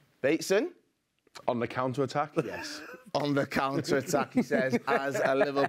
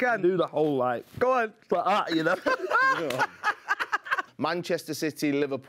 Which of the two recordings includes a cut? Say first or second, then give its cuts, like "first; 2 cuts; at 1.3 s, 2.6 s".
second; 1 cut; at 4.3 s